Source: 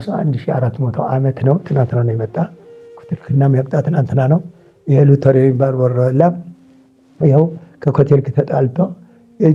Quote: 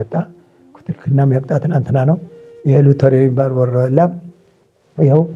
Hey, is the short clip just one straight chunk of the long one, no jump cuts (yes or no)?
yes